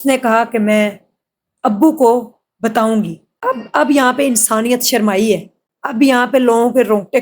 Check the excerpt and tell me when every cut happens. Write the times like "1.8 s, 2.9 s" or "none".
3.2 s